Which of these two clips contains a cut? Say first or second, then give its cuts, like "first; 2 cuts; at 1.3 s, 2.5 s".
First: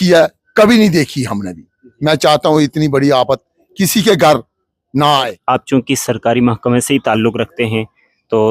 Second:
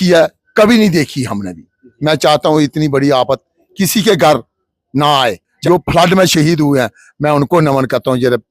first; 1 cut; at 5.4 s